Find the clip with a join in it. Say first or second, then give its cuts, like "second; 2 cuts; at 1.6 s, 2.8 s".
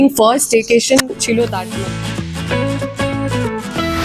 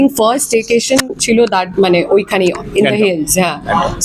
first; 1 cut; at 1.5 s